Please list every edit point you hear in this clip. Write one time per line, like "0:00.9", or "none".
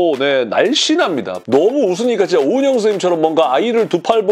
0:01.4